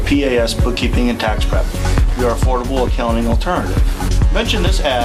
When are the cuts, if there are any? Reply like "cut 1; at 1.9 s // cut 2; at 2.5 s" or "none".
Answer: none